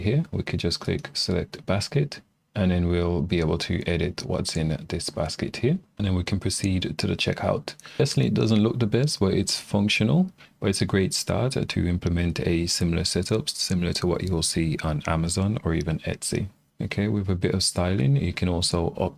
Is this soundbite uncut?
yes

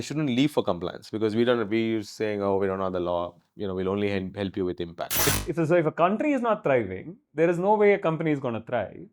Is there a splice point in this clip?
yes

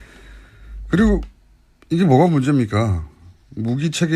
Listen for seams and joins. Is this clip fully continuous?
no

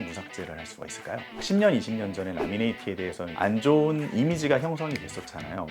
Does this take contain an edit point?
yes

